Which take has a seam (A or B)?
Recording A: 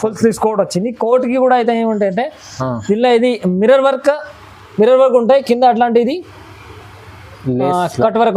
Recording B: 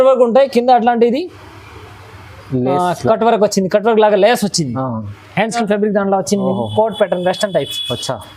B